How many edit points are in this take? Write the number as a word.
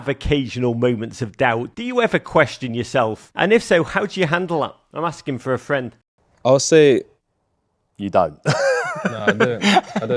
zero